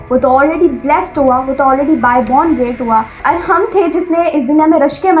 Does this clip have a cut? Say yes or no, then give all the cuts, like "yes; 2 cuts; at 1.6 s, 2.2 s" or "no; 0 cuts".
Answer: yes; 1 cut; at 3.2 s